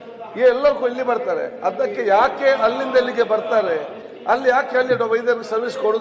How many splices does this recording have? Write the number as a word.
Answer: zero